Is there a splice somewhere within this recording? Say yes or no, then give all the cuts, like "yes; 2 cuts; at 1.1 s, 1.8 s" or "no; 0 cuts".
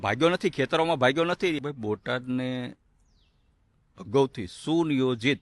yes; 1 cut; at 1.6 s